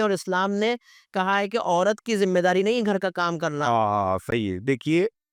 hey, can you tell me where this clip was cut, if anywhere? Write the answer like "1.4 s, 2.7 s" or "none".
none